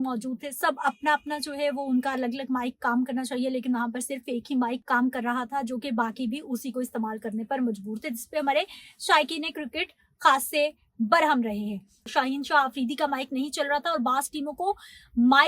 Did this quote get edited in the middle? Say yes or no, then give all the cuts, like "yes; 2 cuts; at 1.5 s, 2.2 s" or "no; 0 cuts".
yes; 2 cuts; at 4.8 s, 12.0 s